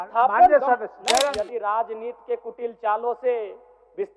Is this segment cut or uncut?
cut